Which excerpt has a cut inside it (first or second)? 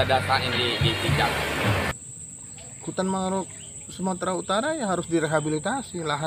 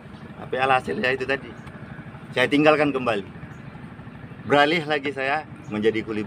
first